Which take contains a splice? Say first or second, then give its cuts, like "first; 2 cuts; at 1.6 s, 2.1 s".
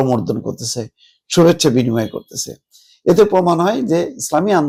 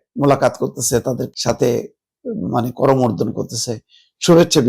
second; 1 cut; at 1.3 s